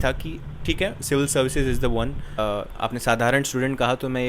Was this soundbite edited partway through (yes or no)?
yes